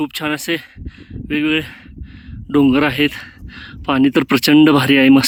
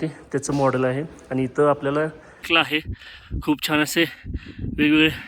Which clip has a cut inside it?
second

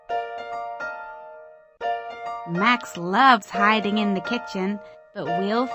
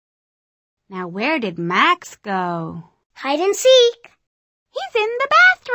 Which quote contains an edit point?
first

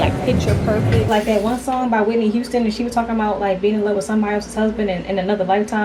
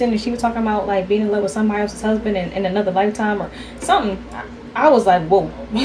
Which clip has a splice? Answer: first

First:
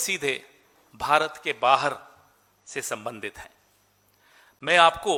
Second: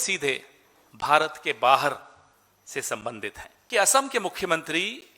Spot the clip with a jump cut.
second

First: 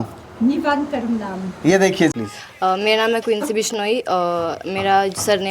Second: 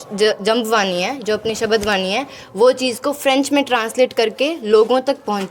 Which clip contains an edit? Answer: first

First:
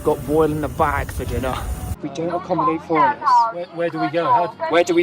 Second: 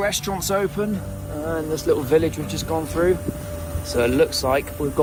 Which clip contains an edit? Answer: first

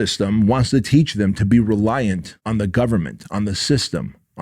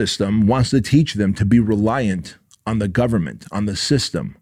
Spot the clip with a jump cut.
first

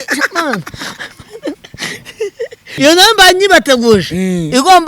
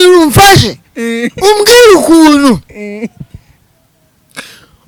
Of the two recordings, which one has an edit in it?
first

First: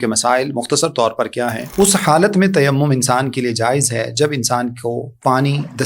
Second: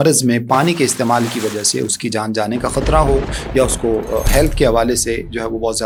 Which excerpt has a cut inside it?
first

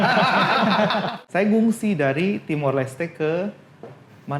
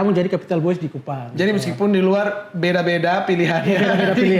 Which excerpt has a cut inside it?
first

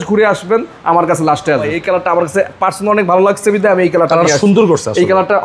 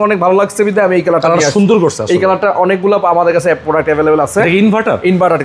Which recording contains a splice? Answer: first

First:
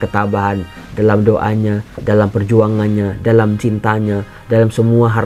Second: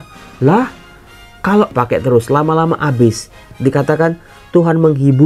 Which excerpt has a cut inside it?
second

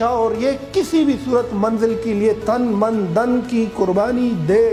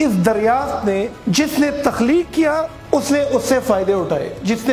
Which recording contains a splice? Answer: second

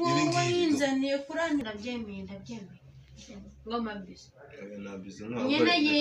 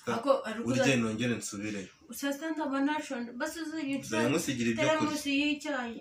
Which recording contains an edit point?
first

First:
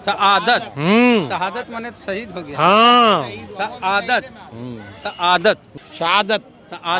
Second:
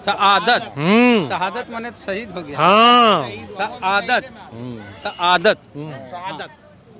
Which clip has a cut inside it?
first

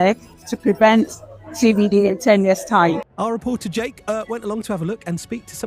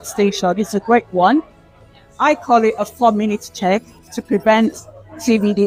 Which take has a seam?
first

